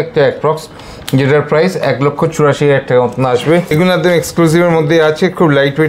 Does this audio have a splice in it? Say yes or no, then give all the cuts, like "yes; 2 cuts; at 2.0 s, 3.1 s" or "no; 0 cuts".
yes; 1 cut; at 3.7 s